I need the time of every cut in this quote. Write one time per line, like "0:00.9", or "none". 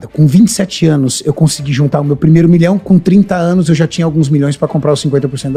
none

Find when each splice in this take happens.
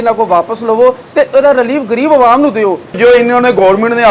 0:03.0

